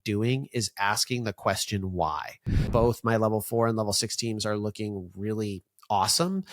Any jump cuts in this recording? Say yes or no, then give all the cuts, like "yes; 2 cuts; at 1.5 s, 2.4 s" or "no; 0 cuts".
yes; 1 cut; at 2.6 s